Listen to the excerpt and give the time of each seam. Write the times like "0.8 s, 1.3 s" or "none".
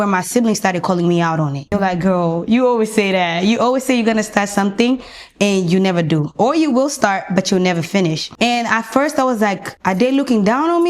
1.7 s, 8.2 s, 9.7 s